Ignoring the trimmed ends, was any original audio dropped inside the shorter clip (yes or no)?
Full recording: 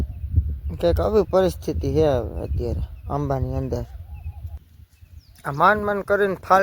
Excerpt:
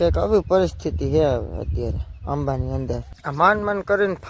yes